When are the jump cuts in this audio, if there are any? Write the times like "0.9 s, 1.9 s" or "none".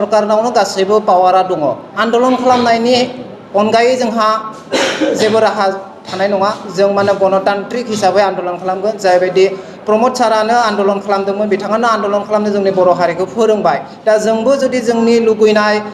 2.0 s